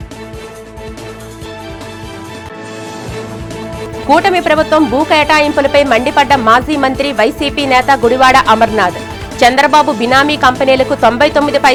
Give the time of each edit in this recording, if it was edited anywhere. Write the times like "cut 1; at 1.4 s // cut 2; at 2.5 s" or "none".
none